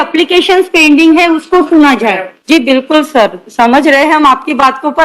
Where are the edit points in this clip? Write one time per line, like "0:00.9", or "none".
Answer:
0:02.3